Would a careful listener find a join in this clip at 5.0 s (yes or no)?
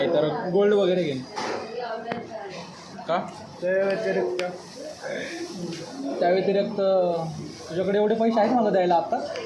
no